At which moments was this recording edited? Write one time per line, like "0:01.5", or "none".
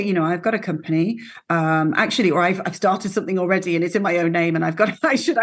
none